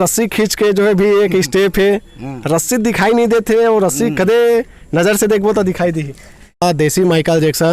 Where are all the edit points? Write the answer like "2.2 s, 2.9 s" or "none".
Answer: 6.6 s